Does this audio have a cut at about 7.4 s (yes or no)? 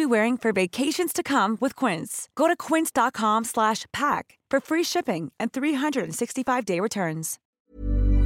yes